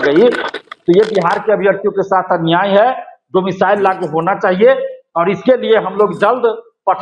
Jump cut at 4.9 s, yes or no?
no